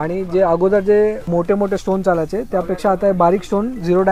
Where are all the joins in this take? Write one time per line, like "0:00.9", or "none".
0:01.2